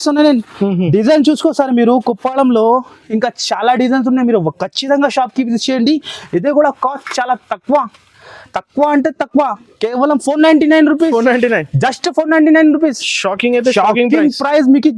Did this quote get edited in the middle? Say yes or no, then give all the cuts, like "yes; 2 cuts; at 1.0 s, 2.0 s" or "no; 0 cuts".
no; 0 cuts